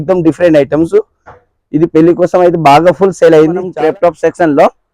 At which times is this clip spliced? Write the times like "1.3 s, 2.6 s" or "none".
3.7 s